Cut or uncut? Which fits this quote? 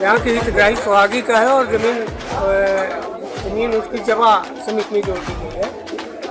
uncut